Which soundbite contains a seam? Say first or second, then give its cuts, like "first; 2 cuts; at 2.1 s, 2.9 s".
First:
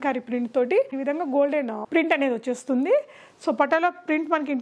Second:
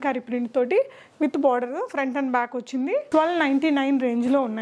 first; 1 cut; at 0.9 s